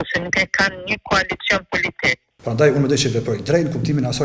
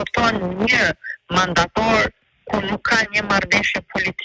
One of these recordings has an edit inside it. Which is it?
first; 1 cut; at 2.3 s

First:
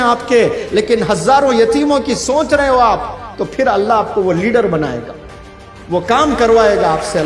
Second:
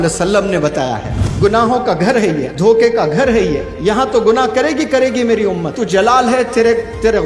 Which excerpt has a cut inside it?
second; 4 cuts; at 1.2 s, 2.5 s, 3.7 s, 5.8 s

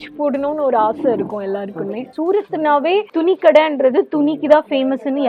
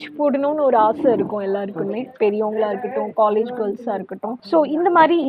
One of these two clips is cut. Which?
first; 1 cut; at 2.1 s

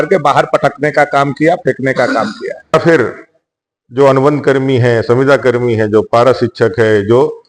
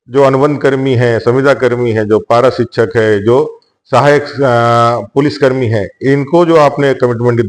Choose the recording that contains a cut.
first; 1 cut; at 2.7 s

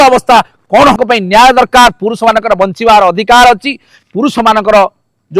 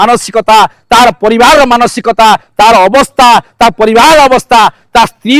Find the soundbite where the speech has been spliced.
first; 1 cut; at 1.0 s

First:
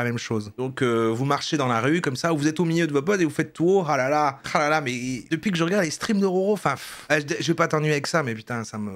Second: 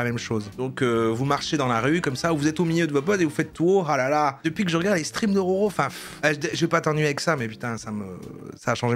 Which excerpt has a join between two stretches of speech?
second; 1 cut; at 4.4 s

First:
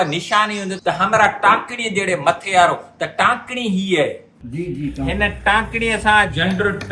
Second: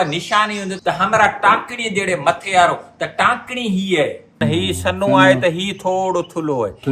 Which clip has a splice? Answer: second; 1 cut; at 4.4 s

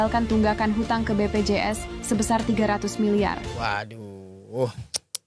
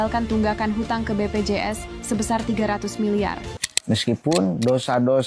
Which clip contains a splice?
second; 1 cut; at 3.7 s

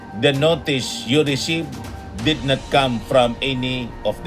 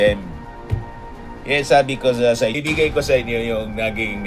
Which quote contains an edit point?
second; 1 cut; at 2.6 s

